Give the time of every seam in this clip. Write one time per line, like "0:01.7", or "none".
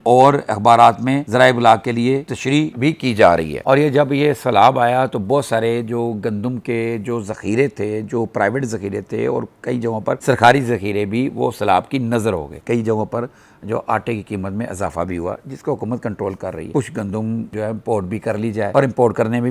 0:03.5
0:12.6
0:16.7